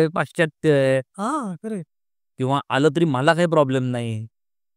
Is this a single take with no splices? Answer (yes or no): yes